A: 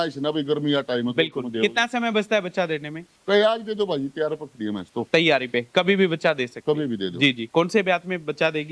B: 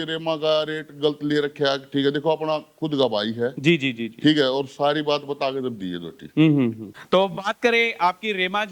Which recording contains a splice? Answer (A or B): B